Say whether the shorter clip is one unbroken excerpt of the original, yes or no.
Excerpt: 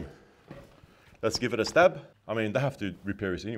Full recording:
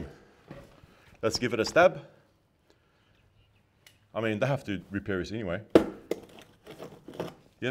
no